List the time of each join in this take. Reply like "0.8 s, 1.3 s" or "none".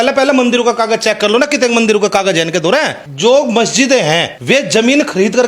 3.0 s, 4.3 s